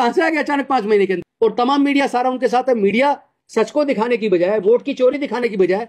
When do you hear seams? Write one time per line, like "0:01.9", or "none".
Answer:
0:01.3